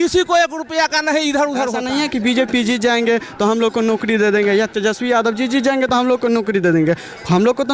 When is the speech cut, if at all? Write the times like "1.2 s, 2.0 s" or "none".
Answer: 1.8 s